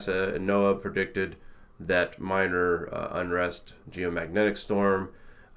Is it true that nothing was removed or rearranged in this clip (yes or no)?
yes